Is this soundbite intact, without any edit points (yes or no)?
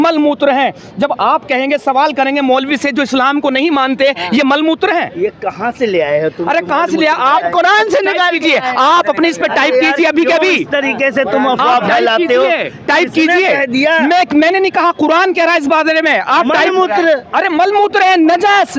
yes